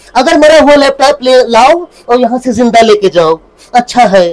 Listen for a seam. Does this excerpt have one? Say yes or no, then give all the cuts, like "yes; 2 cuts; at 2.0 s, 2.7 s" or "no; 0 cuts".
no; 0 cuts